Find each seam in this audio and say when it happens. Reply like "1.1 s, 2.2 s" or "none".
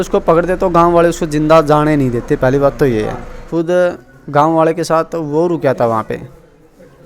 3.5 s